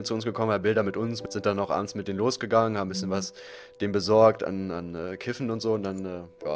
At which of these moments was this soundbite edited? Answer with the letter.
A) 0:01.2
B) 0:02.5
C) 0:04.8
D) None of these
A